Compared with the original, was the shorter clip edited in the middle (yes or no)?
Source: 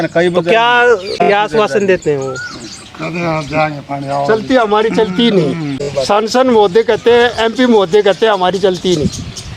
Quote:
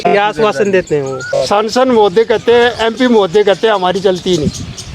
yes